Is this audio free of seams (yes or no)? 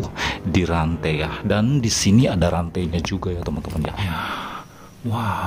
no